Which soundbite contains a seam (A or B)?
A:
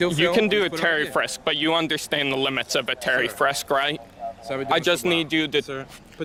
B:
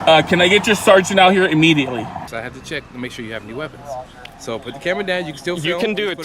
B